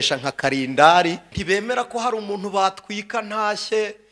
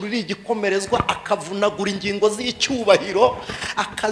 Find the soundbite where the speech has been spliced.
first; 1 cut; at 1.3 s

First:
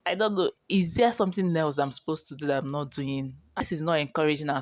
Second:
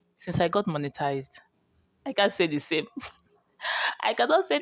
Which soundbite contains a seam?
first; 1 cut; at 3.6 s

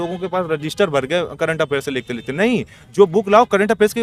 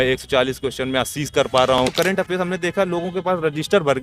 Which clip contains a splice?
second; 1 cut; at 1.9 s

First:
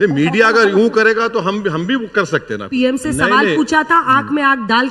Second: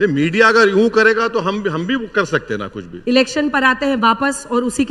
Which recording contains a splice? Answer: first; 1 cut; at 2.7 s

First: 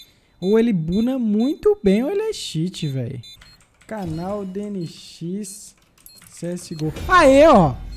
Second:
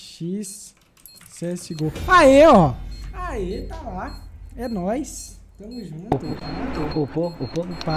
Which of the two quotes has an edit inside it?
first; 1 cut; at 3.3 s

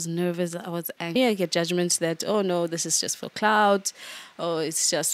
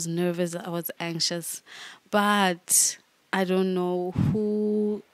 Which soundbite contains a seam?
first; 1 cut; at 1.2 s

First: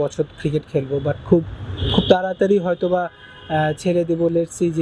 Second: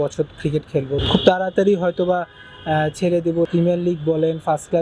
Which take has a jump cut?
second; 2 cuts; at 1.0 s, 3.5 s

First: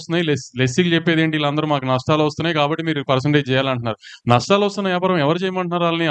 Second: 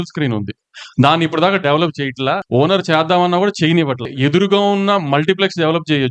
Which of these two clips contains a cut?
second; 2 cuts; at 2.4 s, 4.1 s

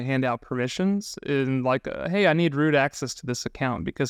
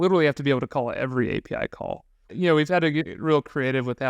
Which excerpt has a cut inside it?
second; 1 cut; at 2.3 s

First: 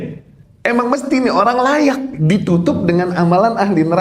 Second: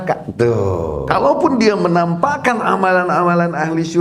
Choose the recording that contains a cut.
second; 1 cut; at 1.0 s

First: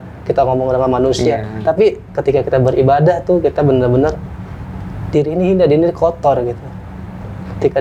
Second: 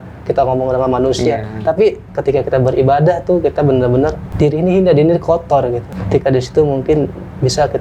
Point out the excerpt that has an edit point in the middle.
second; 2 cuts; at 4.2 s, 5.9 s

